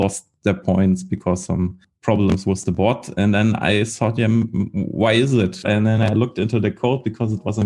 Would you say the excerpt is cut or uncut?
cut